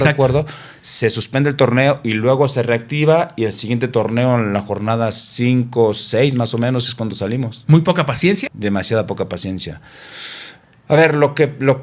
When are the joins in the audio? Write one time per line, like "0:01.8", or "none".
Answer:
0:08.5